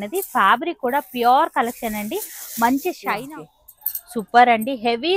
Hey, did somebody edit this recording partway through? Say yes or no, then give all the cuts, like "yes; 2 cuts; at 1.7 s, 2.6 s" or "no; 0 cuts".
yes; 1 cut; at 3.2 s